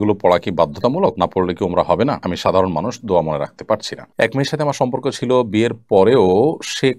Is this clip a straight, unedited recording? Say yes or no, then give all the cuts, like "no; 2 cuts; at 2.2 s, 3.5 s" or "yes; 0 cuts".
no; 3 cuts; at 1.1 s, 2.3 s, 4.1 s